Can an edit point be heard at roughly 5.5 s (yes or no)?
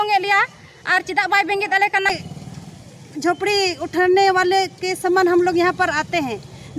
no